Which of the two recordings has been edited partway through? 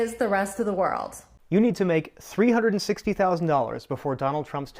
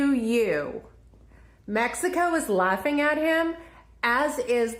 first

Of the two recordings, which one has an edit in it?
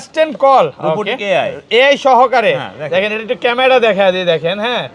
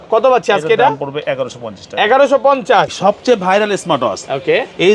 second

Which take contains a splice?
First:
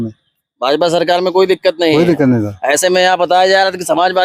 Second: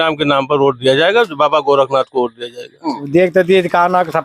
second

